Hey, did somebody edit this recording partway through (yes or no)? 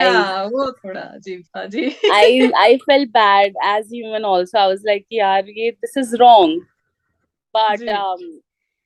no